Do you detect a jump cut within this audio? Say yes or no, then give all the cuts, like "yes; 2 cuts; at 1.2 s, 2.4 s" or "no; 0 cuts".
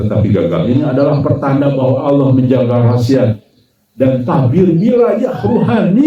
no; 0 cuts